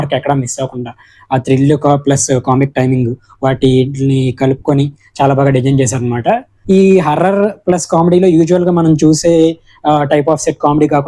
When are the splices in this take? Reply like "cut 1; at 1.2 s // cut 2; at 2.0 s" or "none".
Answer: cut 1; at 6.5 s